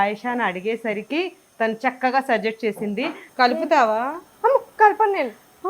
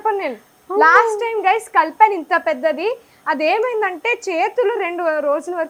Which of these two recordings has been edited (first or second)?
first